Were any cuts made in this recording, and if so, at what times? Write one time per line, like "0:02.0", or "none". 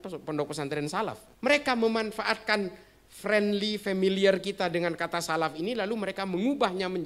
0:01.2